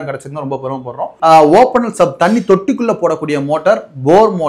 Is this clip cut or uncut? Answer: cut